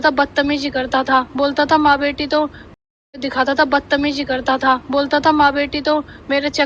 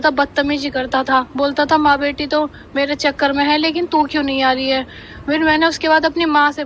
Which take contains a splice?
second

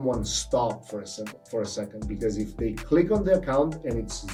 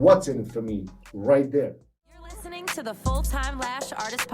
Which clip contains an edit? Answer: second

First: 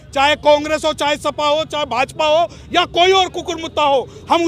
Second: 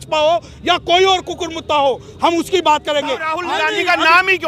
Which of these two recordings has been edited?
second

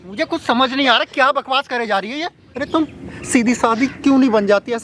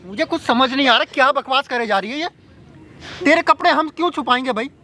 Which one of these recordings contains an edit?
first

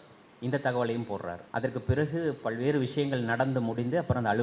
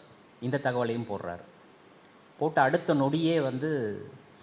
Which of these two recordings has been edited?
first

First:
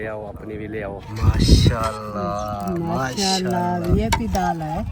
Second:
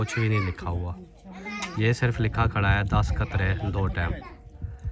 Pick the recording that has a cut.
first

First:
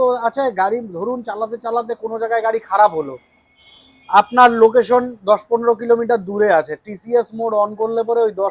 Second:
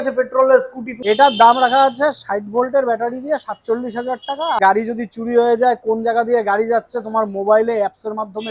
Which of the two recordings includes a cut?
second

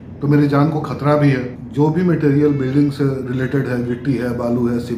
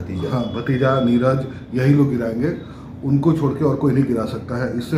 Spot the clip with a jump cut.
first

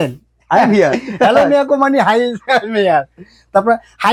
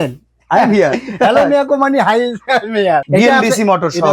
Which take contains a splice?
second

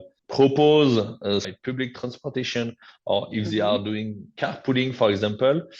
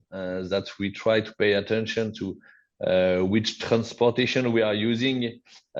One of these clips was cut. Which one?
first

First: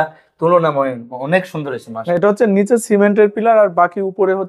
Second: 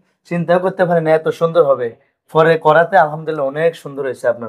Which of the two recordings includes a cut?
first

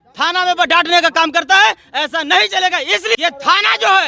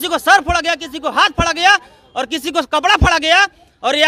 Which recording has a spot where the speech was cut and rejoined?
first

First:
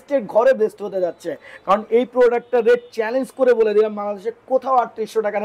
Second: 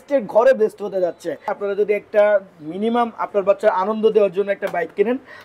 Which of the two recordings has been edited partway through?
second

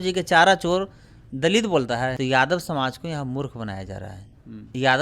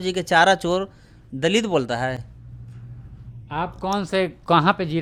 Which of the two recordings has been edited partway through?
first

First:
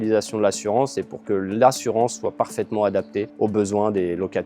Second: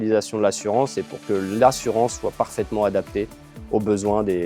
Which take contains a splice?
first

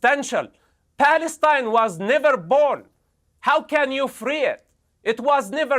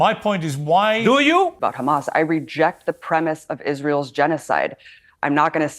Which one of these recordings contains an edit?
second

